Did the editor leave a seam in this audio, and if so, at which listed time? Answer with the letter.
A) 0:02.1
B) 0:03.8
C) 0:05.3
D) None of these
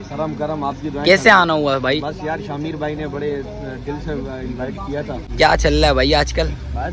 C